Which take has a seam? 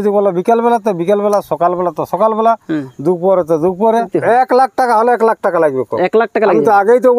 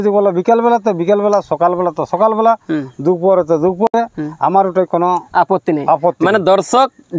first; 1 cut; at 3.9 s

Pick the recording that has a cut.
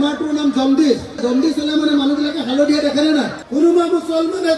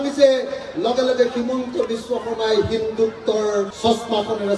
first; 1 cut; at 3.4 s

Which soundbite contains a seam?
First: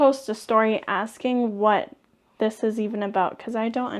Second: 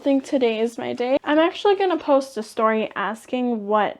second; 1 cut; at 1.2 s

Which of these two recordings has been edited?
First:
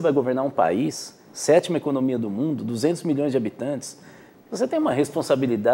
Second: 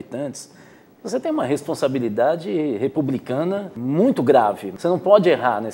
second; 2 cuts; at 3.7 s, 4.7 s

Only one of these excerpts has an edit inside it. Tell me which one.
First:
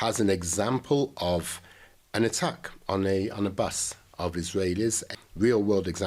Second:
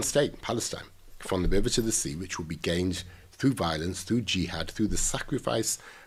first; 1 cut; at 5.1 s

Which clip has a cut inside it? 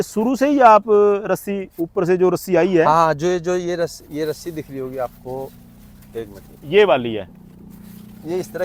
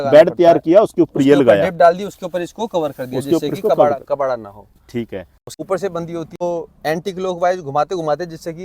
second; 2 cuts; at 5.4 s, 6.4 s

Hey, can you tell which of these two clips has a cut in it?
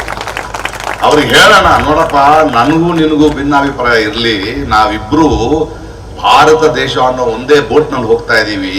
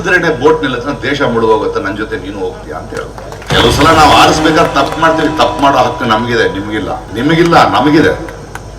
second; 2 cuts; at 3.4 s, 7.0 s

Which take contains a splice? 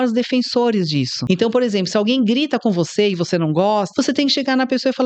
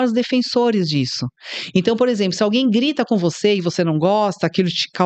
first; 2 cuts; at 1.2 s, 3.9 s

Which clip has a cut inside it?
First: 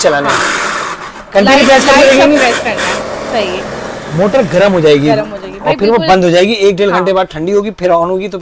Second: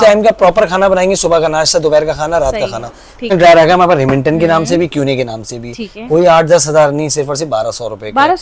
second; 1 cut; at 3.3 s

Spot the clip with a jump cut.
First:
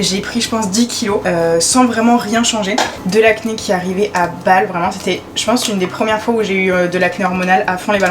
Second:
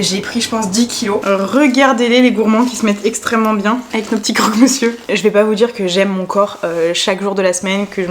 second; 3 cuts; at 1.2 s, 3.9 s, 5.0 s

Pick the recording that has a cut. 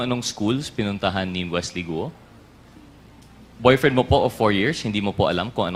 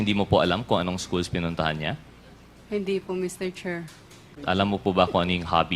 second; 1 cut; at 4.3 s

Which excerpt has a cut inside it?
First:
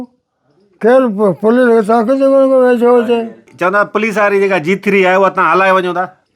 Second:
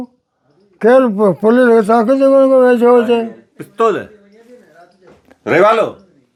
first; 1 cut; at 3.5 s

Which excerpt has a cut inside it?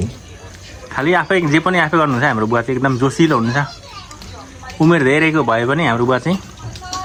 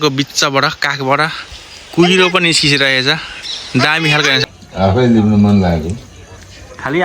second; 1 cut; at 4.4 s

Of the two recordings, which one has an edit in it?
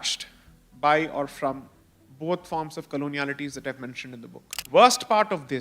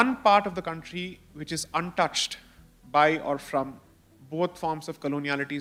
first; 1 cut; at 4.7 s

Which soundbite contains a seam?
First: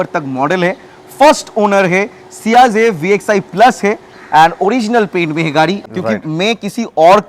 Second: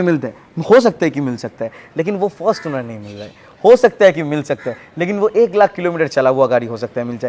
first; 1 cut; at 5.8 s

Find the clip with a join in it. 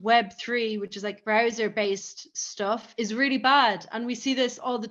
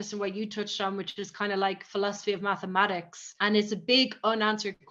first; 2 cuts; at 1.1 s, 2.7 s

